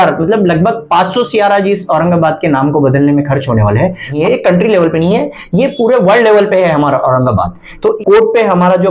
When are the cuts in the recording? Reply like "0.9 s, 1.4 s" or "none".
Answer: 4.1 s, 8.0 s